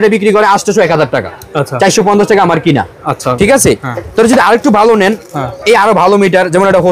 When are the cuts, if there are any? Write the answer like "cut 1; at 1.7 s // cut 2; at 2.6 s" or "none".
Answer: none

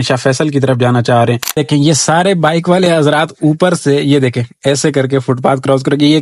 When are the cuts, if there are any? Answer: cut 1; at 1.6 s

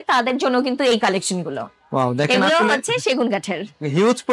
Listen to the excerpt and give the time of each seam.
none

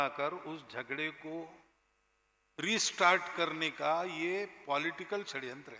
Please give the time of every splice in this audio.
none

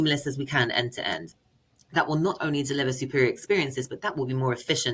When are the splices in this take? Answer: none

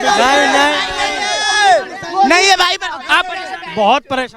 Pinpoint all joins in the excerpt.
none

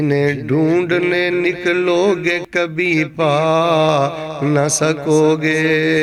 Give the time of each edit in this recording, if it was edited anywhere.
none

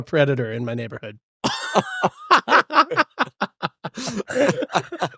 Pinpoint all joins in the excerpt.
none

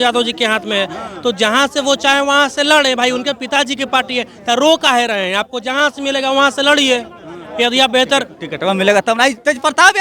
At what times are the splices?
none

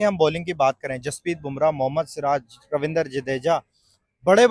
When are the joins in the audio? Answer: none

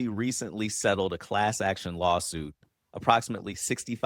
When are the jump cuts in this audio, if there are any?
none

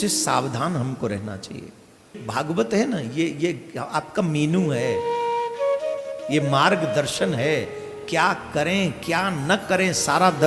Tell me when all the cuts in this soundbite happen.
cut 1; at 2.2 s

